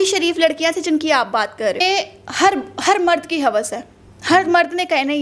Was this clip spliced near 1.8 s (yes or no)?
yes